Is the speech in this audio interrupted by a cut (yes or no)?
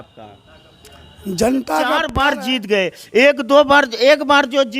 yes